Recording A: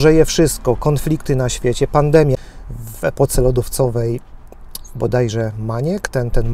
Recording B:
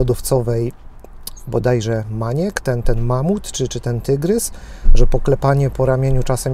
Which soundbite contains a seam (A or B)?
A